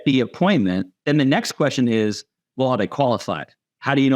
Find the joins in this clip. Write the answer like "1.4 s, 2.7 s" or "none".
0.9 s